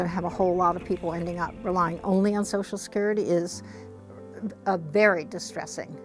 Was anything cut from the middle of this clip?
no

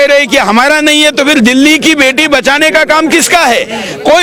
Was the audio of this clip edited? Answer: no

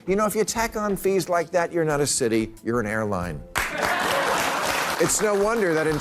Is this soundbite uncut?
no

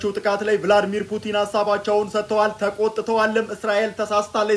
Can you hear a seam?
no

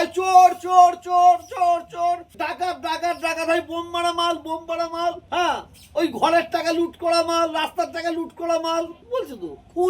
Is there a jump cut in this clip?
yes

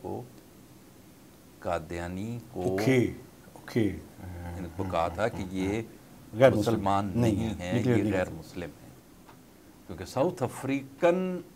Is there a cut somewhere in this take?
yes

